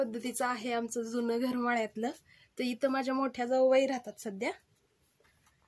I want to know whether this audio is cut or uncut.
uncut